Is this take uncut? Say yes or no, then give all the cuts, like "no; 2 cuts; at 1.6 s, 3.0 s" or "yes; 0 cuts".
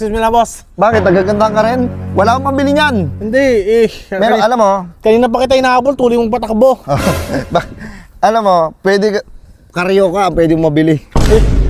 yes; 0 cuts